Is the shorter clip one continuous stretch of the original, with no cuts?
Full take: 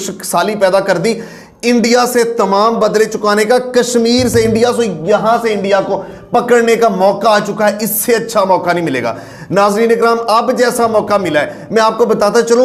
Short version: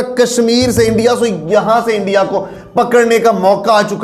yes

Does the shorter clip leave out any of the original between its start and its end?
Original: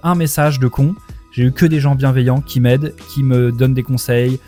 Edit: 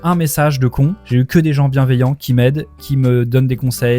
yes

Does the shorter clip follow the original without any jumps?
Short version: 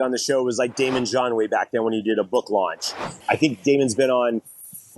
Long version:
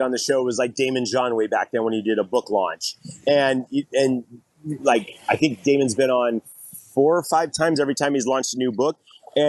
no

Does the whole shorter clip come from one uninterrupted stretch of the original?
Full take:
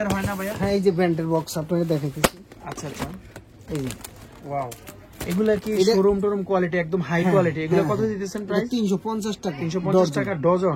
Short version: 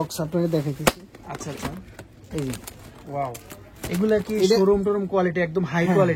yes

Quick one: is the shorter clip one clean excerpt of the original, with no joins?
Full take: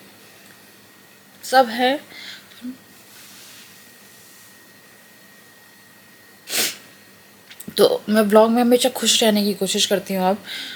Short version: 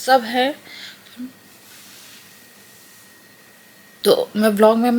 no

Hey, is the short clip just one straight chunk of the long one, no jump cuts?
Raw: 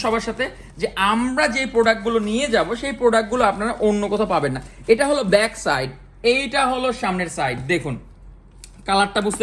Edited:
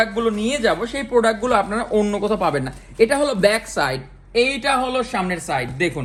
yes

